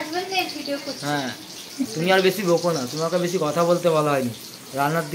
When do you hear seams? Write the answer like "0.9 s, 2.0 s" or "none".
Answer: 1.9 s